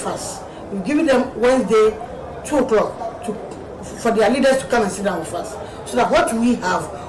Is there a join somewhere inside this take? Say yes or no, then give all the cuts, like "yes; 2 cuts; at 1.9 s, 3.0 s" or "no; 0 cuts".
no; 0 cuts